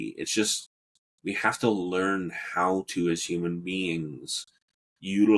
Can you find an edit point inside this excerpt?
no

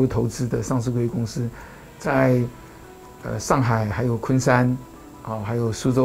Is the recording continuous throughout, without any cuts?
yes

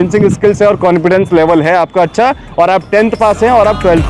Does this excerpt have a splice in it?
no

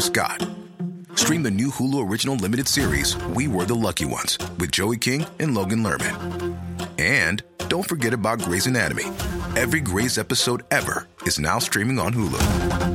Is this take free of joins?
yes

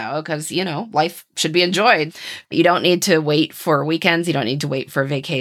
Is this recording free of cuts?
no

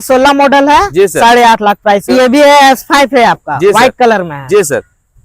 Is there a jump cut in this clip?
yes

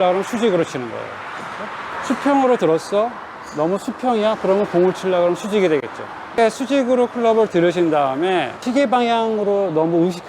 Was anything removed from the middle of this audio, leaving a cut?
yes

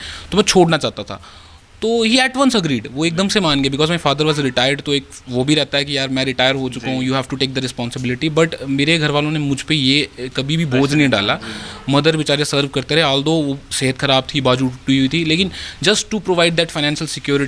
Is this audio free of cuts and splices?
yes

